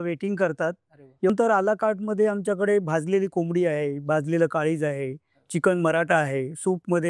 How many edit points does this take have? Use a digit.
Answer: 1